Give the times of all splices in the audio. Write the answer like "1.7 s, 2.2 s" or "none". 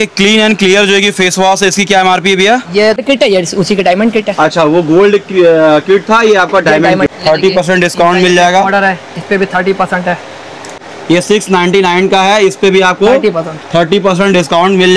3.0 s, 7.1 s, 10.7 s